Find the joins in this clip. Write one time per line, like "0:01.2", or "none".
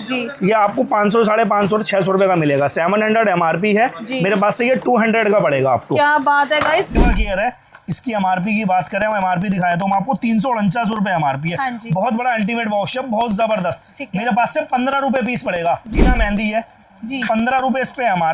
0:07.0
0:15.9